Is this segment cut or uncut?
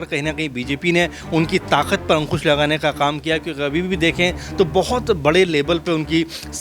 uncut